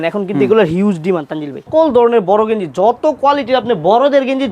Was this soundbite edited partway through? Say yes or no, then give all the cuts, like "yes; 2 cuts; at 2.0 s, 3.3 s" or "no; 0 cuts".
yes; 1 cut; at 1.7 s